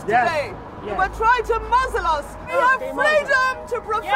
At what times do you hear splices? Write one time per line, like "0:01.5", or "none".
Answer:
0:02.5